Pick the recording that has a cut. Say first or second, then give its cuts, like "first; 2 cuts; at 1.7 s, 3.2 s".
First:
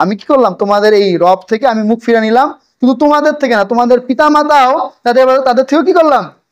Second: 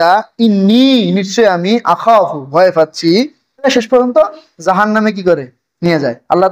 second; 1 cut; at 3.7 s